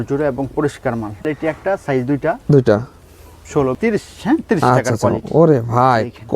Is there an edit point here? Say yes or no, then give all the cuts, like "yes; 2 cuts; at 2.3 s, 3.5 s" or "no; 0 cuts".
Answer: yes; 2 cuts; at 1.3 s, 3.8 s